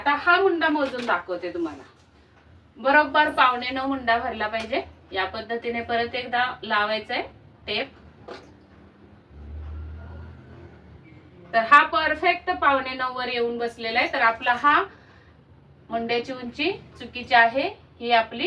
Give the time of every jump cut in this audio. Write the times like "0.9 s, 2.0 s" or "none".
none

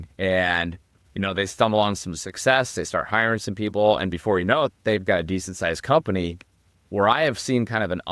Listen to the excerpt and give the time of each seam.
none

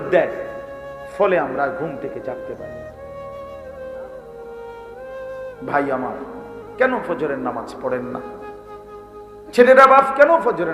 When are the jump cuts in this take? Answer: 3.1 s, 5.6 s

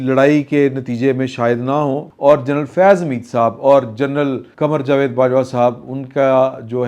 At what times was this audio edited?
2.1 s, 4.4 s

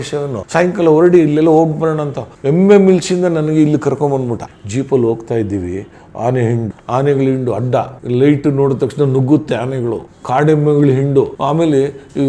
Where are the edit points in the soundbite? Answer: 4.4 s, 6.8 s, 10.1 s

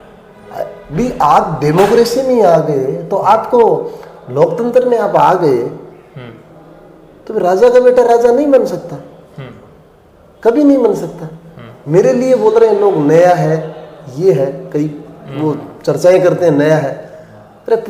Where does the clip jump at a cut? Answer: none

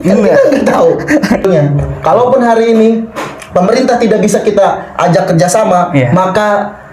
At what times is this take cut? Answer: 1.4 s

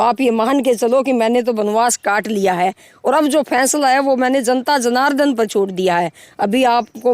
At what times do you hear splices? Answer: none

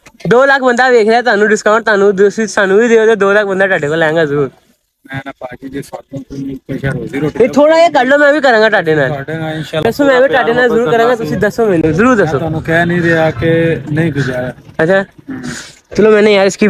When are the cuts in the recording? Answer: none

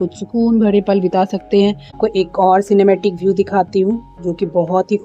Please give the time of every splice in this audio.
2.0 s

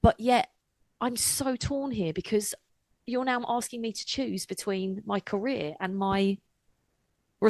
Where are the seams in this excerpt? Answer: none

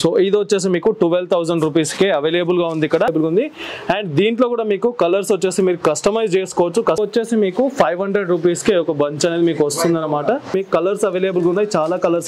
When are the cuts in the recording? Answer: 3.1 s, 7.0 s, 10.5 s

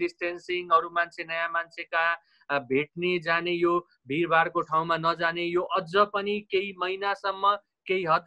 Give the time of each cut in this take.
none

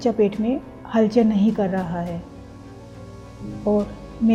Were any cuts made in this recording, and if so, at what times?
none

